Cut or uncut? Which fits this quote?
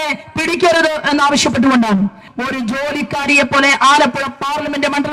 cut